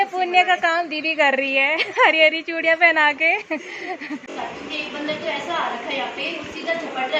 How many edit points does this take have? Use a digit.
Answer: 1